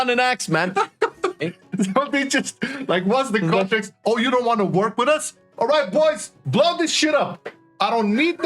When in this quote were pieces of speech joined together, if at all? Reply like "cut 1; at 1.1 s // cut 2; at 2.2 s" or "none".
cut 1; at 1.5 s